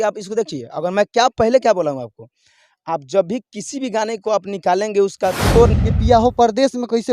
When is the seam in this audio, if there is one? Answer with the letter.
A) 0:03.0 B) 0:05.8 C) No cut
B